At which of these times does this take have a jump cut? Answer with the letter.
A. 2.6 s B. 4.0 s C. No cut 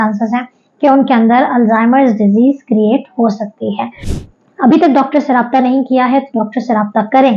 B